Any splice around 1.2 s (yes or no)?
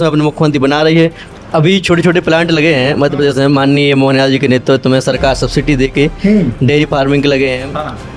yes